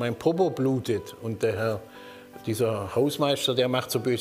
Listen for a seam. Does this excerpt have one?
no; 0 cuts

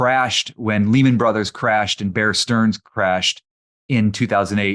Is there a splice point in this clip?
no; 0 cuts

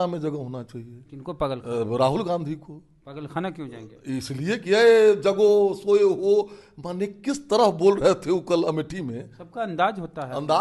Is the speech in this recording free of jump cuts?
yes; 0 cuts

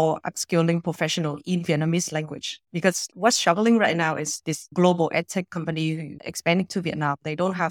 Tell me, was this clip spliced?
no; 0 cuts

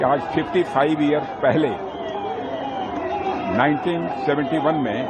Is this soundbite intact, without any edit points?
yes; 0 cuts

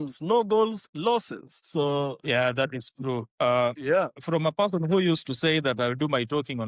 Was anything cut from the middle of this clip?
no; 0 cuts

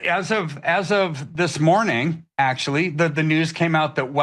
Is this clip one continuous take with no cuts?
yes; 0 cuts

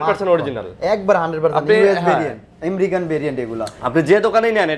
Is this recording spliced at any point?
no; 0 cuts

